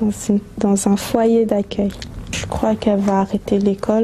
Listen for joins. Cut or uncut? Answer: uncut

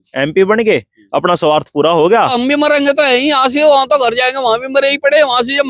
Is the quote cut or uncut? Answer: cut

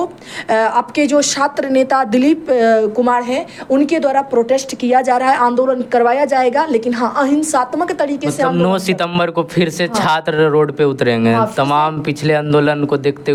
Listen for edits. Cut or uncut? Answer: uncut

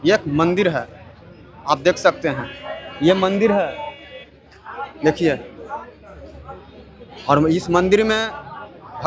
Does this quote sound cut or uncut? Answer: uncut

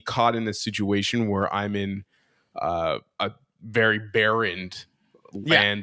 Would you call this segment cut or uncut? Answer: uncut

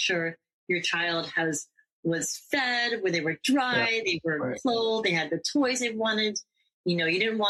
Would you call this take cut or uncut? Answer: uncut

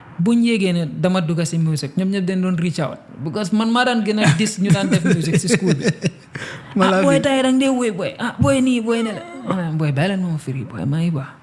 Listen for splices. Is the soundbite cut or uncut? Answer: uncut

